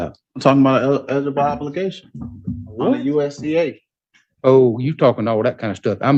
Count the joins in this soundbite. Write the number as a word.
zero